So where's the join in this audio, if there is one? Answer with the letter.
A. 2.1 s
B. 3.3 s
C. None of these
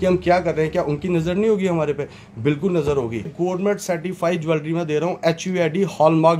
B